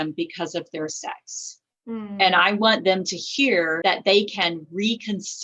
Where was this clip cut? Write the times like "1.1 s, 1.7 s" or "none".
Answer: 3.8 s